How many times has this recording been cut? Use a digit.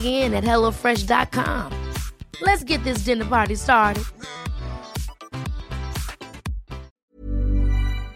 1